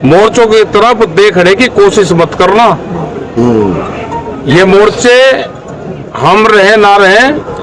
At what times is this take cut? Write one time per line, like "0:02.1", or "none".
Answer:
none